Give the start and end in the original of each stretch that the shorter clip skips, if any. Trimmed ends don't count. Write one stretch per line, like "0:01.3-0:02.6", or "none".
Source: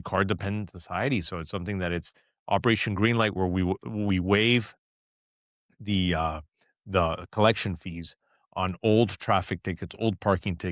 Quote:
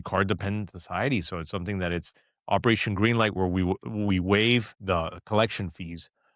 0:04.7-0:06.8